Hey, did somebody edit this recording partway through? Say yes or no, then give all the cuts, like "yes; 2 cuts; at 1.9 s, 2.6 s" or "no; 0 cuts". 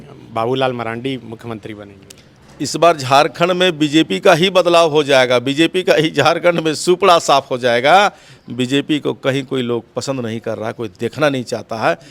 no; 0 cuts